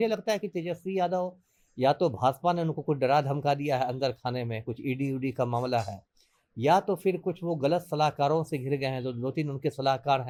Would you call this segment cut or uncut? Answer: uncut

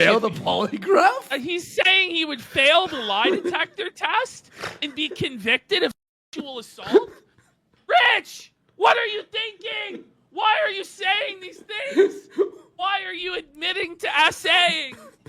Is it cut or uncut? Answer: uncut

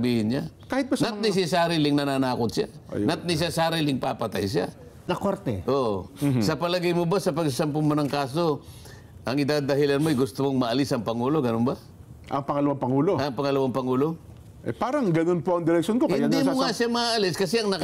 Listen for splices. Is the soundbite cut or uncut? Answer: cut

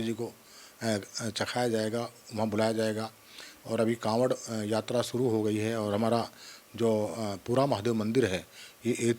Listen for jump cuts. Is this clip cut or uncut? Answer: uncut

